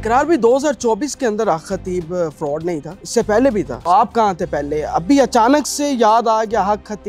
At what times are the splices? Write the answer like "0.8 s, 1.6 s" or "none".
3.0 s, 3.7 s